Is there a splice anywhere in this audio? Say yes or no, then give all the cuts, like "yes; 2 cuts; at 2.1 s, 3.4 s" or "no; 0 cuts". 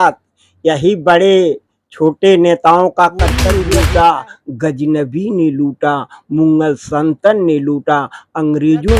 yes; 1 cut; at 3.5 s